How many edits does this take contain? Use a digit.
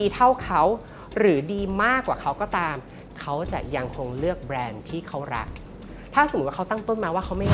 0